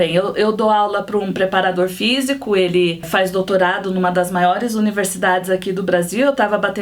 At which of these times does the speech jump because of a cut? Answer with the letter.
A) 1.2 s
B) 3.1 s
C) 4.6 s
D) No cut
B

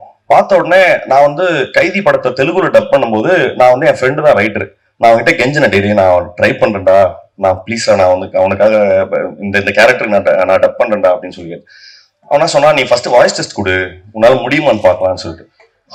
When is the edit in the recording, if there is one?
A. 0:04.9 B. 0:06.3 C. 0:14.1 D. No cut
D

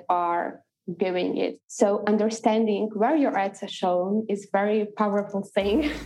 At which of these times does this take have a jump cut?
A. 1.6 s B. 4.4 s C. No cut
A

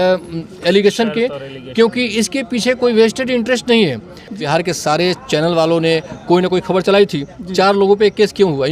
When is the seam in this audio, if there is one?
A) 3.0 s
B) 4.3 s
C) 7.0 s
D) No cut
B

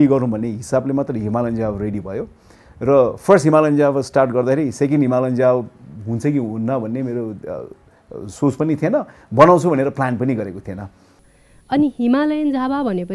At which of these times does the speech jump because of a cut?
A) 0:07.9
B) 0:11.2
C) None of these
B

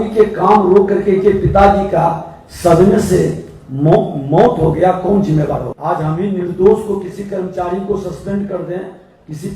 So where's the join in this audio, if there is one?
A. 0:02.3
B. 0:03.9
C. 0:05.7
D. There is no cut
C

